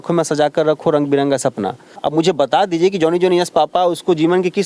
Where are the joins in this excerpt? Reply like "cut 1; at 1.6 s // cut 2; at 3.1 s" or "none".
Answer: cut 1; at 2.0 s